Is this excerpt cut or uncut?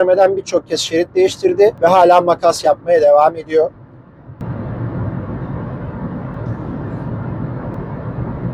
uncut